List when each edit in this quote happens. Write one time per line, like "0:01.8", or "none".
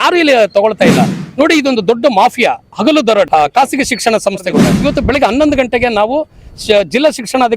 0:04.7

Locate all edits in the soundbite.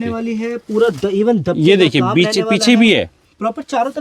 none

